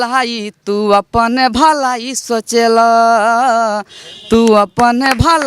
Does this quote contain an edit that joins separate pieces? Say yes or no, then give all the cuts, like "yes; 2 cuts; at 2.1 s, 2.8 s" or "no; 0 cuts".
no; 0 cuts